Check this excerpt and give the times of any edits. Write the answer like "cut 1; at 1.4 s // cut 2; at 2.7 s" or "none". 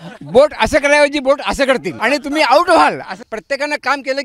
cut 1; at 1.9 s // cut 2; at 3.2 s